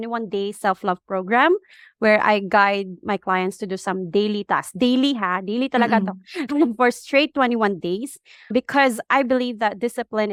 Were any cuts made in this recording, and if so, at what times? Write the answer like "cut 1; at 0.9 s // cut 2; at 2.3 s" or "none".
none